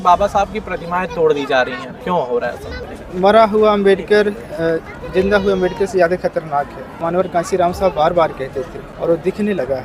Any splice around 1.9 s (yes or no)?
yes